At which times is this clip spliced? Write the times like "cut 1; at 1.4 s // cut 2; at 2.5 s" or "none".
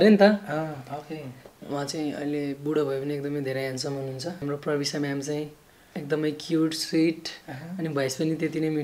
cut 1; at 1.6 s // cut 2; at 4.4 s

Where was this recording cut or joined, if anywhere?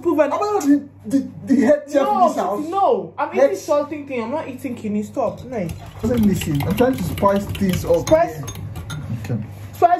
cut 1; at 6.0 s

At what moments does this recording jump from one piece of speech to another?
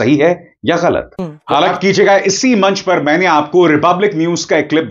cut 1; at 1.4 s

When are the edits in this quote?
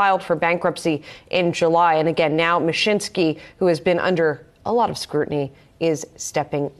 none

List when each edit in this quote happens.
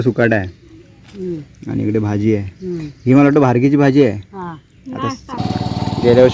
cut 1; at 5.4 s

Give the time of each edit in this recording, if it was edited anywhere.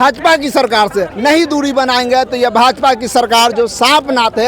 cut 1; at 1.1 s

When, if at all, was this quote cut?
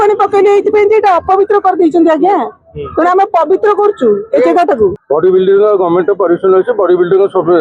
cut 1; at 5.0 s

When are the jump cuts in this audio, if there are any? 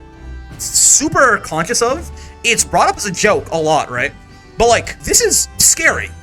cut 1; at 4.9 s

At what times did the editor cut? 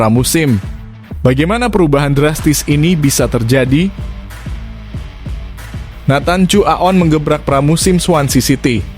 cut 1; at 4.1 s // cut 2; at 6.0 s

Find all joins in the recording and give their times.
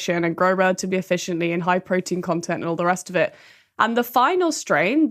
none

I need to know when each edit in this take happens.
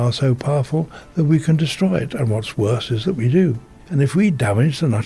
cut 1; at 3.8 s

